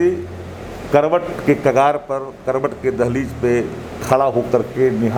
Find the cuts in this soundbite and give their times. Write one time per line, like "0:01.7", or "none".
none